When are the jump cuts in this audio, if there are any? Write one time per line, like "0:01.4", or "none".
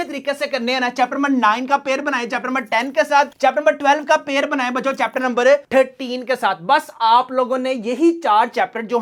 none